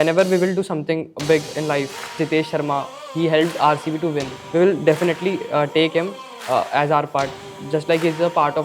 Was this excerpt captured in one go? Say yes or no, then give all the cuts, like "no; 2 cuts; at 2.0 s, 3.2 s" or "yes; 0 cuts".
no; 2 cuts; at 2.1 s, 4.3 s